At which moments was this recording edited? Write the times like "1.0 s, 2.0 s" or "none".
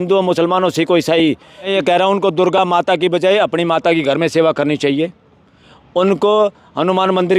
1.7 s